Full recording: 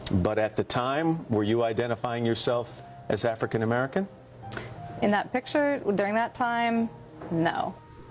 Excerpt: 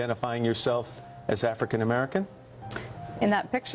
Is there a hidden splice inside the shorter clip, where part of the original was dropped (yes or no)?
no